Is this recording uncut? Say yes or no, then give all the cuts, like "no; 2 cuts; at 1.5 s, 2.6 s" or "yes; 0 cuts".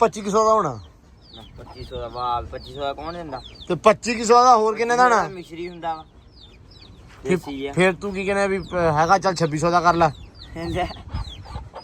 yes; 0 cuts